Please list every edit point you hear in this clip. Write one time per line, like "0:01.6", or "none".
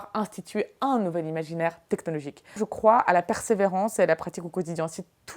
0:02.4